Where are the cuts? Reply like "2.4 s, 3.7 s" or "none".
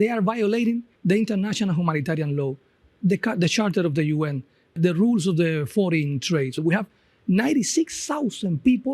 0.9 s, 4.7 s